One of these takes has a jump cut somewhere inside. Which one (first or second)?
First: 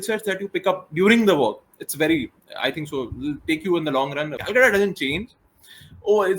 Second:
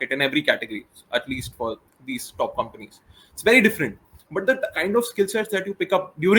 first